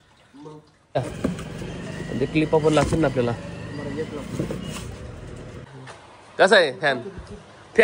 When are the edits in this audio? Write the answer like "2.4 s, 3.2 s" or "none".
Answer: 1.0 s

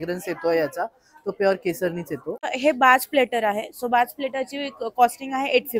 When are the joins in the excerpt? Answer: 2.5 s

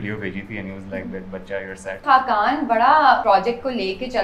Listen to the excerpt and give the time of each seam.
2.0 s, 3.2 s

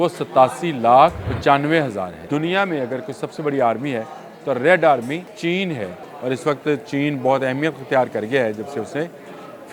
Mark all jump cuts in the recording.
1.3 s, 2.2 s, 5.3 s, 6.0 s

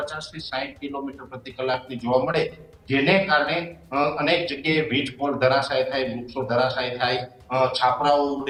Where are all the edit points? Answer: none

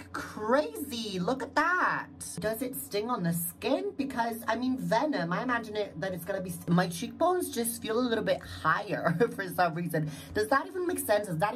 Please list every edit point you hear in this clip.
2.4 s, 6.6 s

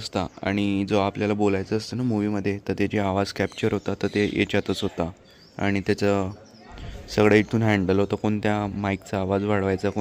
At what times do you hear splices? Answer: none

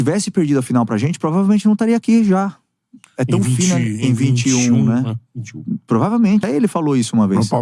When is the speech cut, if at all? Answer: 6.5 s

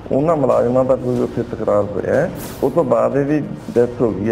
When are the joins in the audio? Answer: 2.4 s

